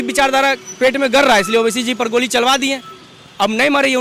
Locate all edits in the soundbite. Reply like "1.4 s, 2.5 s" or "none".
none